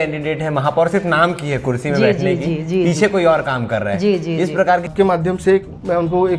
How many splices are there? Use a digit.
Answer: 1